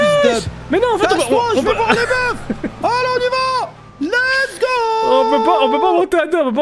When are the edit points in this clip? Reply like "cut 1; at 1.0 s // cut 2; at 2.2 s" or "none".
none